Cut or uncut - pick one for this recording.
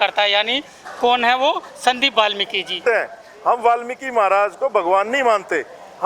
cut